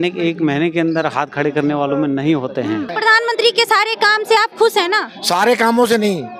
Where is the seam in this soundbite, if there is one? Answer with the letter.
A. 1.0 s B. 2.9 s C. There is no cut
B